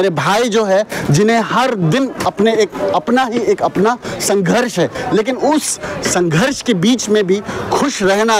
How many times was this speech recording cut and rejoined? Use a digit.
0